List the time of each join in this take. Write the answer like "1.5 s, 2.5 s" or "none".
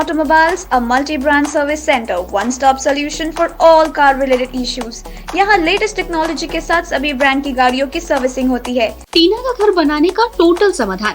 9.1 s